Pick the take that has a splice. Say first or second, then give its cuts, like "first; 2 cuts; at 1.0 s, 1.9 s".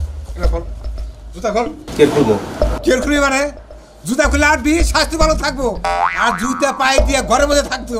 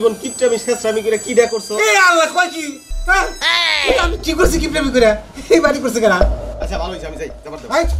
second; 1 cut; at 6.2 s